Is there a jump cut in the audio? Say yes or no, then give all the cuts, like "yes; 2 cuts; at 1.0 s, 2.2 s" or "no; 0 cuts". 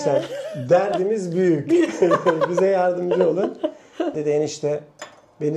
yes; 1 cut; at 4.2 s